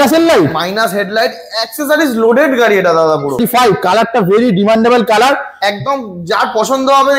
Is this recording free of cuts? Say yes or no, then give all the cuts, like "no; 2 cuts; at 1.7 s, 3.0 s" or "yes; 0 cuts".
no; 1 cut; at 3.4 s